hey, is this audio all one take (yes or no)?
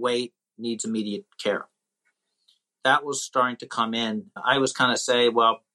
no